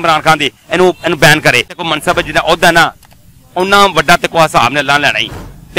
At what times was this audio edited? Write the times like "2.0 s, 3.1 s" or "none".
1.8 s